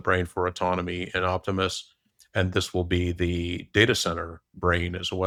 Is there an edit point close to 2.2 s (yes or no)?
no